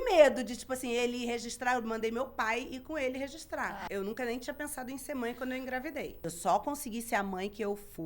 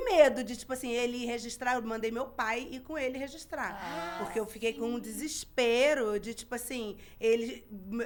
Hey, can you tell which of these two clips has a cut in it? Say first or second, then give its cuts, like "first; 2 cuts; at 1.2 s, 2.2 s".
first; 2 cuts; at 3.8 s, 6.3 s